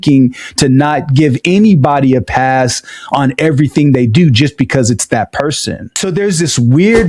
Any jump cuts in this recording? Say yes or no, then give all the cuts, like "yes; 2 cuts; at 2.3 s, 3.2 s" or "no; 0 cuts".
yes; 1 cut; at 5.9 s